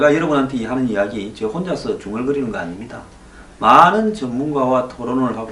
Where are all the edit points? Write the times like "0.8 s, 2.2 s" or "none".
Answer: none